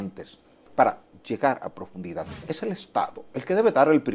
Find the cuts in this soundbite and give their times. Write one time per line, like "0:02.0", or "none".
0:02.5